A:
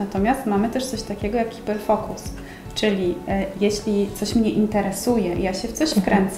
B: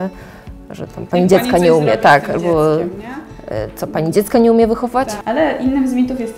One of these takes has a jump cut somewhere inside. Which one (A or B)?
B